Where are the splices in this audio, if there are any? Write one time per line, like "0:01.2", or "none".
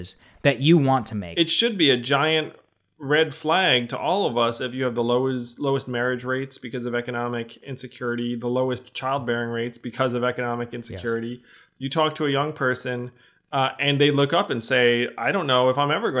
0:01.2